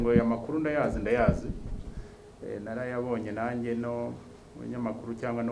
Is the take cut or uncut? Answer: uncut